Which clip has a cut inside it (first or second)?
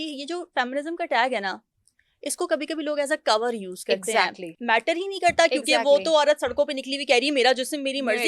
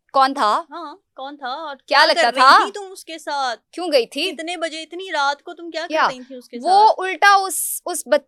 first